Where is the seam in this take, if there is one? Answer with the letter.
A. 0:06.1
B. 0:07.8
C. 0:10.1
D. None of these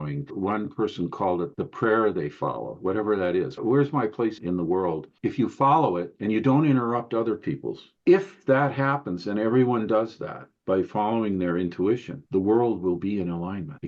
B